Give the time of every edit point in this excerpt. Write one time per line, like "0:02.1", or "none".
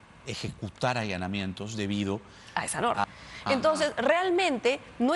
0:03.0